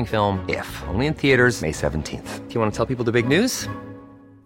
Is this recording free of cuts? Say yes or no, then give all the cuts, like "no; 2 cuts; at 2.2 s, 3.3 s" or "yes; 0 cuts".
yes; 0 cuts